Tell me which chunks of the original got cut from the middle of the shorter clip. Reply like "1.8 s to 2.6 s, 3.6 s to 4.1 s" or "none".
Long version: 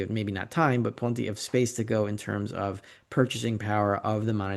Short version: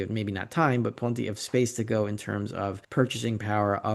2.8 s to 3.0 s

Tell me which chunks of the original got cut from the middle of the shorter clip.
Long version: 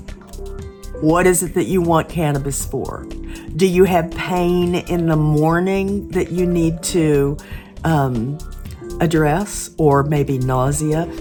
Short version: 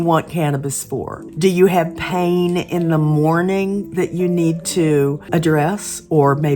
3.0 s to 3.4 s, 7.4 s to 8.9 s

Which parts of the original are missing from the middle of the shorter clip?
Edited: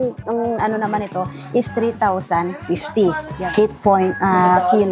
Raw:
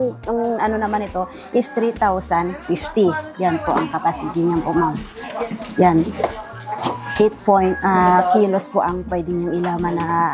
3.4 s to 7.0 s

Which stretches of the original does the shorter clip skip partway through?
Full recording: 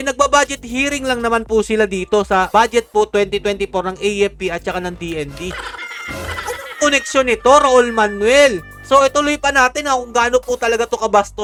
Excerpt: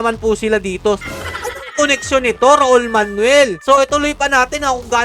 2.3 s to 6.0 s, 8.6 s to 8.8 s

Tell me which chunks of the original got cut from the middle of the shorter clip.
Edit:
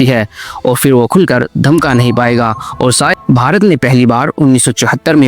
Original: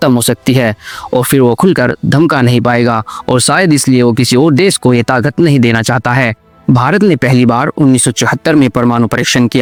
3.6 s to 6.5 s

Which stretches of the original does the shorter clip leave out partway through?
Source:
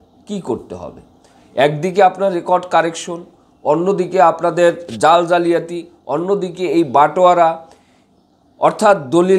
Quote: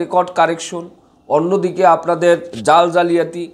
none

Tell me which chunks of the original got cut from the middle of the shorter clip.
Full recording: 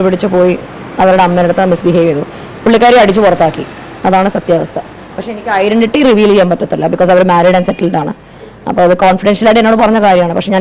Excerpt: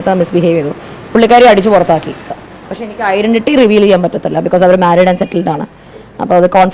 3.8 s to 4.8 s

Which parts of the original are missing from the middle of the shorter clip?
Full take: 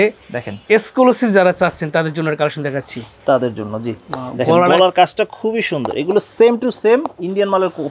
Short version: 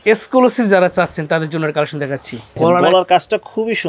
3.2 s to 4.4 s

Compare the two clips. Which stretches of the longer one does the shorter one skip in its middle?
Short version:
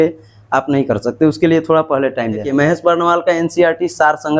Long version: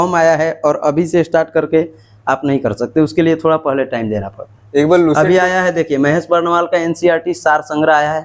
4.2 s to 5.9 s

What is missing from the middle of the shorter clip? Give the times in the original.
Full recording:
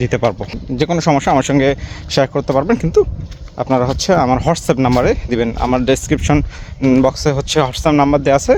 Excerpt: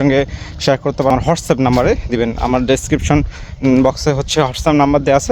2.6 s to 4.3 s

